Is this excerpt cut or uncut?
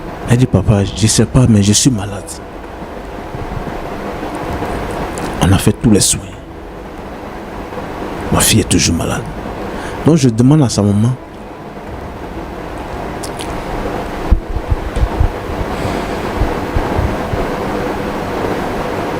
uncut